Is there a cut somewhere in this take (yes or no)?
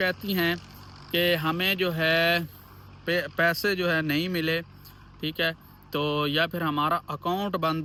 no